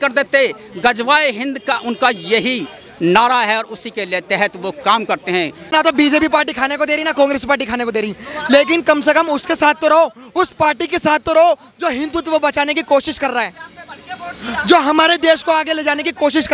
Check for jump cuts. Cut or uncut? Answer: cut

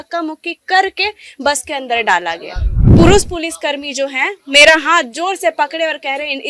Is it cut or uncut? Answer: cut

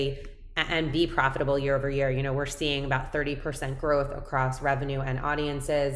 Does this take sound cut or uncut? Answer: uncut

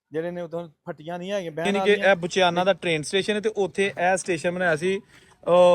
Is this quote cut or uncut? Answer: cut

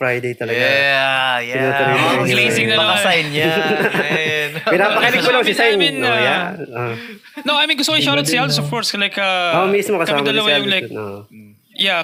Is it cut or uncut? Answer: uncut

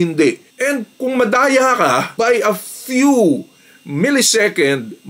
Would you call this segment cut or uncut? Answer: uncut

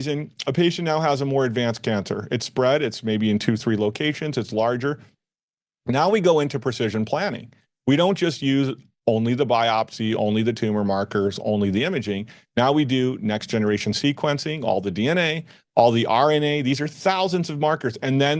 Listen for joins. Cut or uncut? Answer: uncut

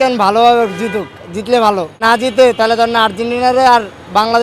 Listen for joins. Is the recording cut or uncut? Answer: cut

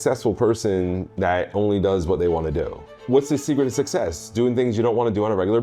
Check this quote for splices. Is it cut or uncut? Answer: cut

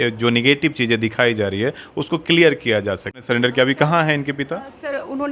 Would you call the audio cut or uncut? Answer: cut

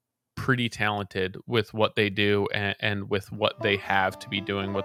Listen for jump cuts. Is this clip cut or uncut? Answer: uncut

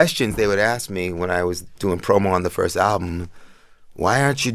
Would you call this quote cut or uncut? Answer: uncut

